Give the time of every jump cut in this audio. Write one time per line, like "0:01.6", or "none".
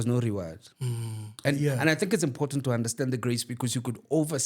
0:01.4